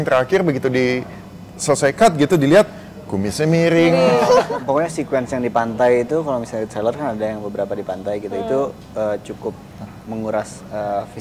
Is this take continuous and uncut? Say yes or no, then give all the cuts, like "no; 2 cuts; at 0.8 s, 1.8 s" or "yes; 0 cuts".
no; 1 cut; at 4.5 s